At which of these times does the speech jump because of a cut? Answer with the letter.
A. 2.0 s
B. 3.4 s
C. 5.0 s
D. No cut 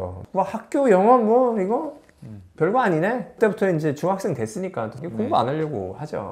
C